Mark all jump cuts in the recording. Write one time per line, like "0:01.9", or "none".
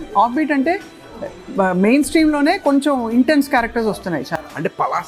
none

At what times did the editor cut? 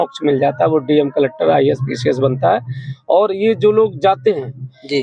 none

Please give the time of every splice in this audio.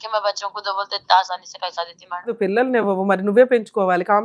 0:02.3

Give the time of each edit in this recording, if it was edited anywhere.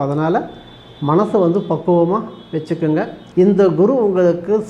0:03.2

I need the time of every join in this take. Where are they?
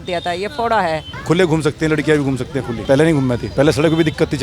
0:01.1
0:02.8
0:03.5

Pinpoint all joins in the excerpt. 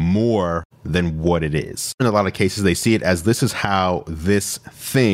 0:02.0

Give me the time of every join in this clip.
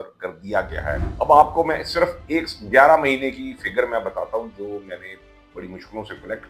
0:01.1

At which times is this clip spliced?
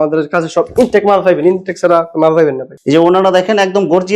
0:02.8

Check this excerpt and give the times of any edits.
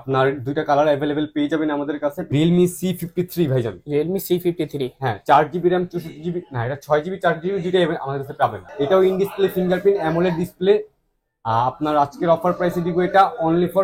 0:02.2
0:08.6

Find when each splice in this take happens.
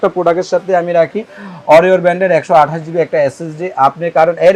none

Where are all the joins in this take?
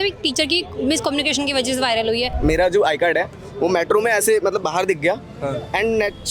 0:02.3

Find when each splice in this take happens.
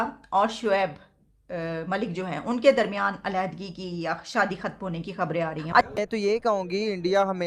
0:06.0

